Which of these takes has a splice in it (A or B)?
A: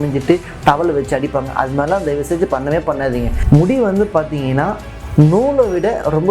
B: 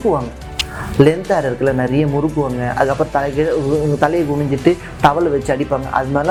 A